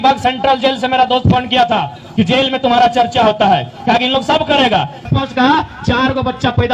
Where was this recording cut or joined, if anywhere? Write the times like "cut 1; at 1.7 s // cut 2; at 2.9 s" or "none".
cut 1; at 5.0 s